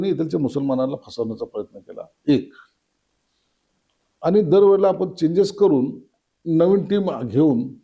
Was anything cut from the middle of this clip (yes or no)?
no